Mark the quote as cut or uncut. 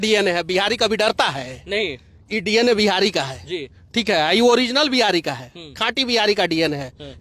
uncut